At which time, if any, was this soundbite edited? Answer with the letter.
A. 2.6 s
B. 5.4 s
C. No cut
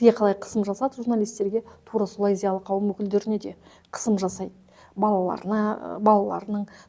C